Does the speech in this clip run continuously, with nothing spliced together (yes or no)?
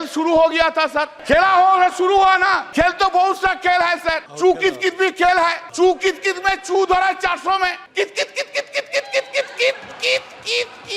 no